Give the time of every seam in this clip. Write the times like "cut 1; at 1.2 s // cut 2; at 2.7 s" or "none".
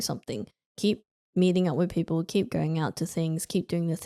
none